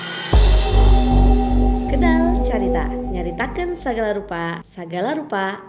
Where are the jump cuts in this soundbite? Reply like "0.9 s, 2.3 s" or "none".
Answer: 3.1 s